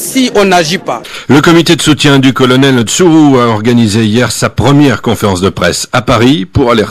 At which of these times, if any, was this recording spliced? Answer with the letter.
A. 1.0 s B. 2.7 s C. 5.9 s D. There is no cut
A